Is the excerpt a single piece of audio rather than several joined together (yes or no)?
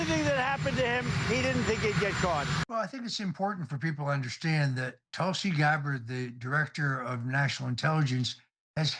no